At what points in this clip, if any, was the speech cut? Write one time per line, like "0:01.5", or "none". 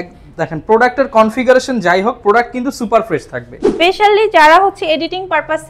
0:03.7